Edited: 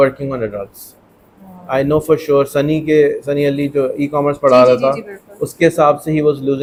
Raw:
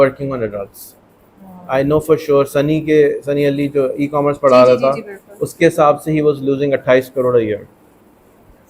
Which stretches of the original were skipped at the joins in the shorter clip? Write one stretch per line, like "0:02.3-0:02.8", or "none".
none